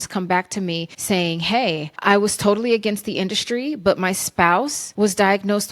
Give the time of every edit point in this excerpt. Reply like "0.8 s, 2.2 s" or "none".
0.9 s, 1.9 s, 4.8 s